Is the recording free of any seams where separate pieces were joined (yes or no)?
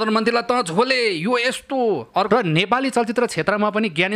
no